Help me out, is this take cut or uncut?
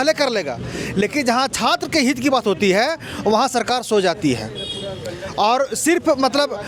uncut